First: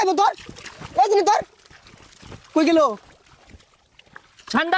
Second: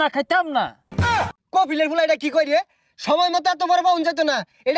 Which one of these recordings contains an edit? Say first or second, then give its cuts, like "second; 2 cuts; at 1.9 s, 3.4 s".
second; 1 cut; at 1.0 s